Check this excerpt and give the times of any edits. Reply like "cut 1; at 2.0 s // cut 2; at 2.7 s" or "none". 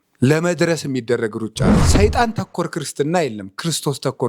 cut 1; at 1.8 s